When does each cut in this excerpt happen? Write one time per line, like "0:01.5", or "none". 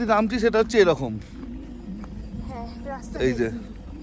none